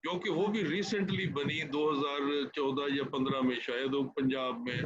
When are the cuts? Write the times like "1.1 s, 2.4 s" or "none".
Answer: none